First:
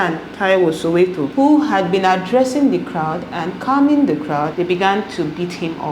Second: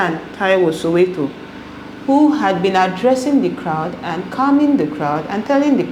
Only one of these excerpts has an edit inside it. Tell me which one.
first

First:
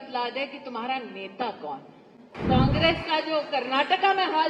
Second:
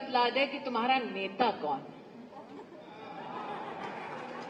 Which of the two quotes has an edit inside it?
first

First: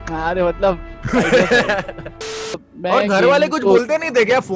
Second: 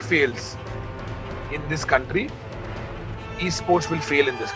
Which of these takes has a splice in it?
first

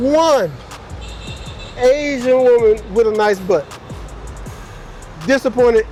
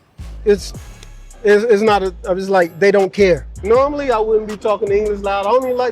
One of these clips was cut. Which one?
second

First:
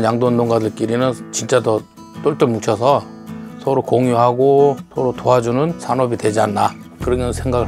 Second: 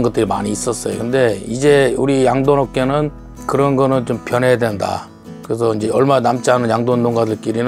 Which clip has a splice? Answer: first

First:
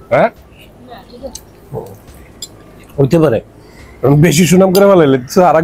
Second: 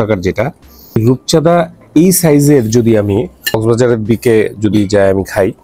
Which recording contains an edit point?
second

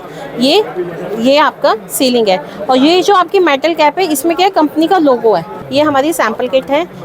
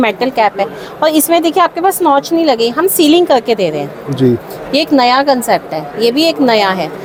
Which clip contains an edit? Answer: first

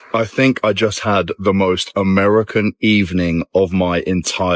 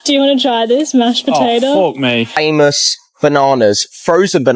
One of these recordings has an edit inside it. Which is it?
second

